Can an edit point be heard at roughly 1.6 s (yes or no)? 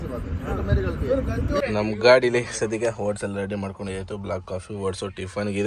yes